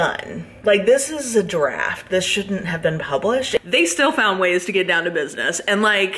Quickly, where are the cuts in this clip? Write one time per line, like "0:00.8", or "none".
0:03.6